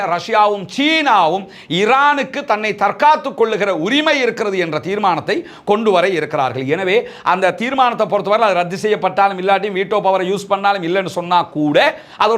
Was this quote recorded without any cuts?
yes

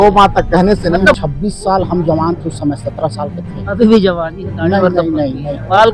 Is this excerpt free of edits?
no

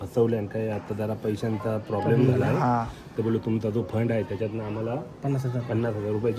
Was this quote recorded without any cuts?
yes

